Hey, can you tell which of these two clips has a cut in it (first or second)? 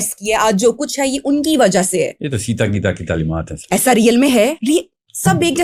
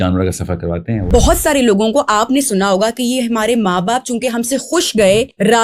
second